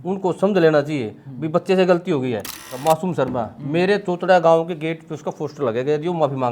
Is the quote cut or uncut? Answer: cut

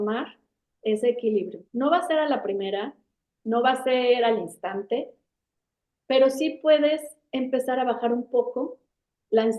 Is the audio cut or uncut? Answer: uncut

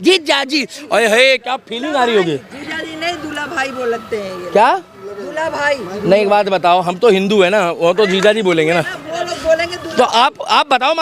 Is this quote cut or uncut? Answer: uncut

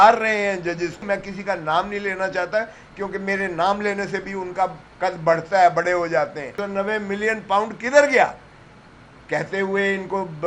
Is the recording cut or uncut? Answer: cut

